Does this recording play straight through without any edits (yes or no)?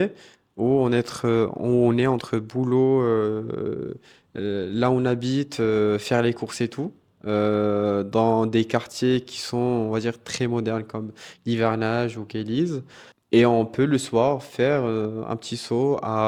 yes